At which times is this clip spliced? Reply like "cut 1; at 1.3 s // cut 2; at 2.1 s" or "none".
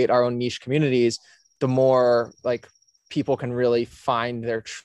none